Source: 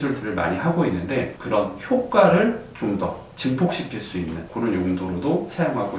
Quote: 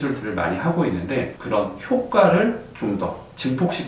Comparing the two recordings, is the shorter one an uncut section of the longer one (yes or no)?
yes